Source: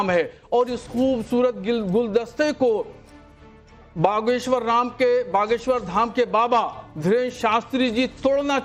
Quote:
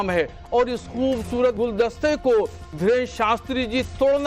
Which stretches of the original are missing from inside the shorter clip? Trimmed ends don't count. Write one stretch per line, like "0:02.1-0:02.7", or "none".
0:01.6-0:01.9
0:03.0-0:06.9